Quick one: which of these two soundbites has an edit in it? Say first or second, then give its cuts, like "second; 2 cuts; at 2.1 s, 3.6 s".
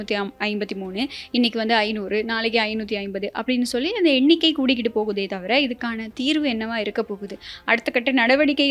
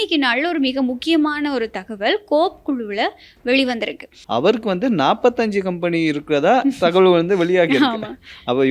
second; 1 cut; at 4.1 s